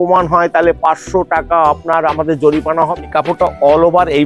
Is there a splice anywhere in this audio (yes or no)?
yes